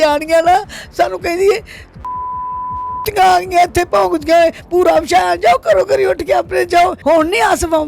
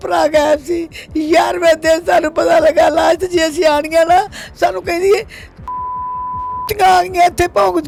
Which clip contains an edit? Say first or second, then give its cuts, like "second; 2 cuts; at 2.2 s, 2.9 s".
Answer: first; 1 cut; at 7.0 s